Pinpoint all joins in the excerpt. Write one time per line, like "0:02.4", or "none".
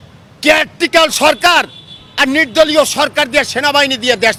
none